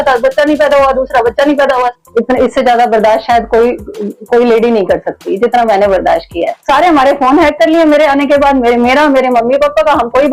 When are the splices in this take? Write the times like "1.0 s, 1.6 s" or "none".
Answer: 1.9 s, 6.5 s

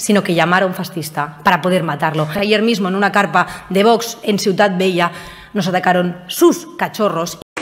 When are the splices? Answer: 2.4 s

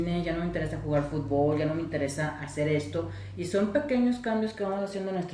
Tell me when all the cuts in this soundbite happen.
none

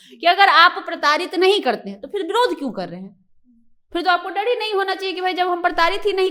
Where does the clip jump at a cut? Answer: none

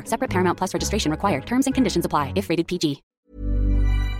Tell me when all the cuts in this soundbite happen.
3.1 s

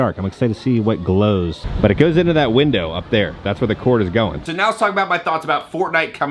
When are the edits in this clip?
1.6 s, 4.4 s

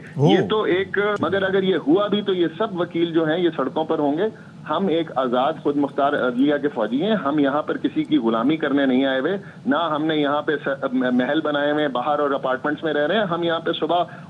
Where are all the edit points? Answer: 1.2 s

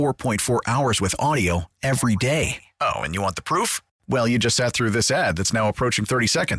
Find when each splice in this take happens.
none

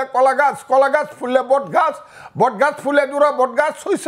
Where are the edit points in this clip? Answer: none

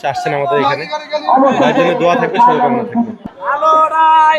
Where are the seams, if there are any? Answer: 3.3 s

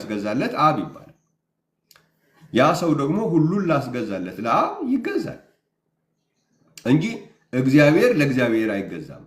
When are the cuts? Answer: none

